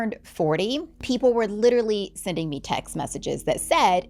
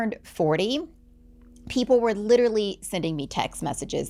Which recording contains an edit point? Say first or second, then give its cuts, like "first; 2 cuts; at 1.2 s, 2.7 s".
first; 1 cut; at 0.9 s